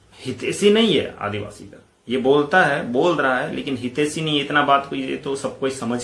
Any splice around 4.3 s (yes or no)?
no